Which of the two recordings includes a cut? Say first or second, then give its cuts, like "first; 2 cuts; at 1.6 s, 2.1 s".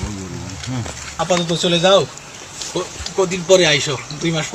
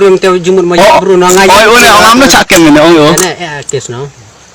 first; 1 cut; at 1.2 s